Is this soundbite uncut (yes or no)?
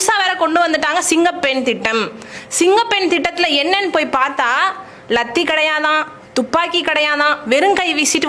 yes